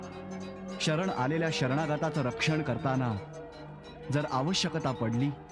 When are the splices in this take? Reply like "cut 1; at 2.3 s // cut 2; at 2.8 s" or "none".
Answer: none

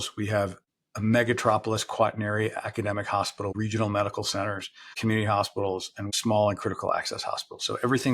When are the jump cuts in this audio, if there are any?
cut 1; at 3.5 s // cut 2; at 5.0 s // cut 3; at 6.1 s

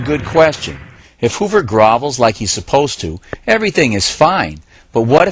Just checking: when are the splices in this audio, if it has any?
cut 1; at 2.3 s

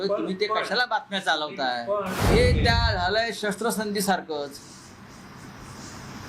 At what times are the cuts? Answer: cut 1; at 2.2 s

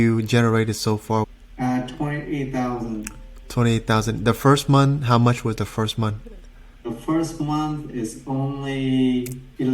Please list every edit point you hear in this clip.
cut 1; at 1.3 s

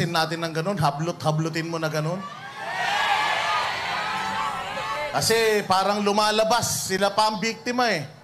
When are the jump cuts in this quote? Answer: cut 1; at 5.1 s

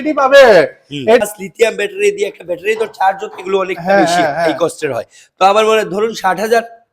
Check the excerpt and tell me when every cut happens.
cut 1; at 1.2 s

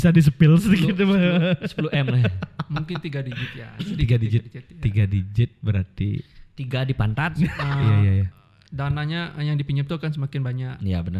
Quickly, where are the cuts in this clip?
cut 1; at 7.6 s

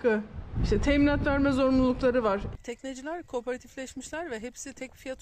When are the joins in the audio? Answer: cut 1; at 2.5 s

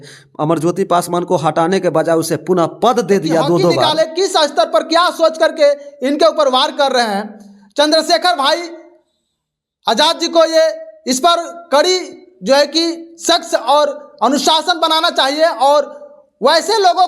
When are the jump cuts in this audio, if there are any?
cut 1; at 3.9 s

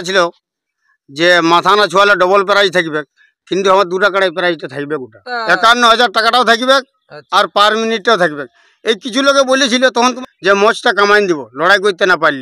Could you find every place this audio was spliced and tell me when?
cut 1; at 5.3 s // cut 2; at 10.2 s

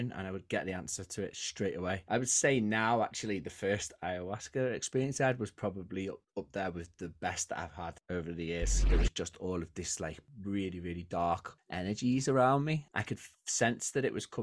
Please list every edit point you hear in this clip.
cut 1; at 2.0 s // cut 2; at 8.8 s // cut 3; at 12.9 s

